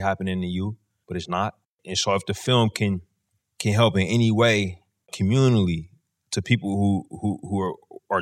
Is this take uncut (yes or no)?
no